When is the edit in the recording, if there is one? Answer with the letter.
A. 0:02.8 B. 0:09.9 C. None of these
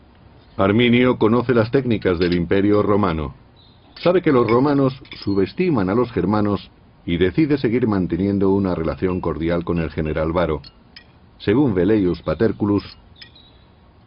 B